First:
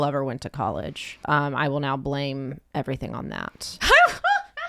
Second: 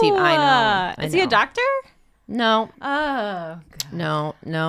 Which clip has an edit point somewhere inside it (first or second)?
first